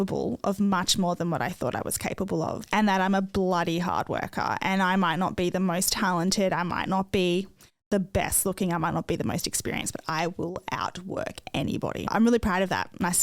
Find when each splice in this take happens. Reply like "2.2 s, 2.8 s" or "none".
2.6 s, 12.1 s

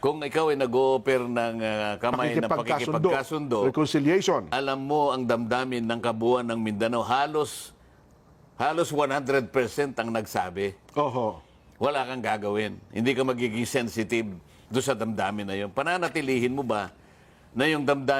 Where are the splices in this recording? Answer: none

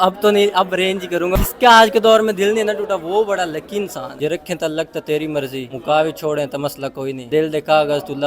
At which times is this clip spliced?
1.4 s, 4.1 s, 5.7 s, 7.2 s

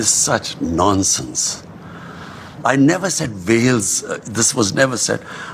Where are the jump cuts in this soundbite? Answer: none

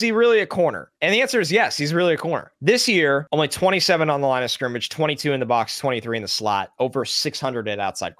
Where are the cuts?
0.9 s, 2.5 s, 3.2 s

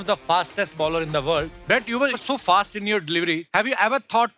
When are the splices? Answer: 1.6 s, 3.4 s

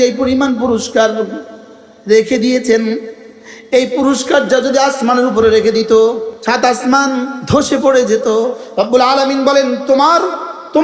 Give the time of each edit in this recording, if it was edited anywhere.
6.3 s, 7.4 s, 8.6 s

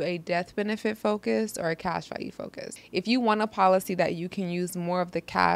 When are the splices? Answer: 2.8 s

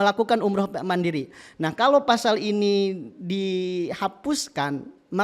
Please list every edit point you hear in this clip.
none

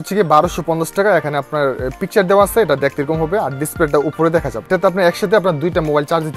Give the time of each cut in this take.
4.7 s

